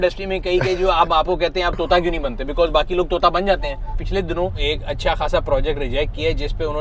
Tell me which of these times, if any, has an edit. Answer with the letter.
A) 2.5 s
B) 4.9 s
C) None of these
C